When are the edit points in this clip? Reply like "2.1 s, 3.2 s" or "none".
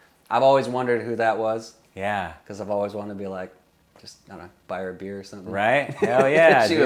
none